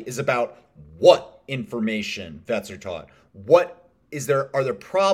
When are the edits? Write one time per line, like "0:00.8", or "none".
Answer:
0:02.3

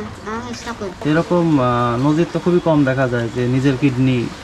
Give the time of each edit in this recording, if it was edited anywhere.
0:01.0

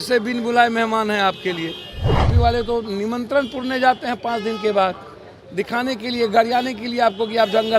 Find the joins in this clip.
0:02.3

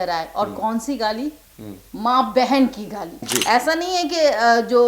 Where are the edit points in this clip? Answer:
0:03.3

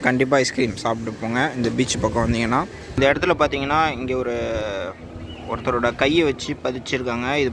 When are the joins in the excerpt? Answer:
0:03.0

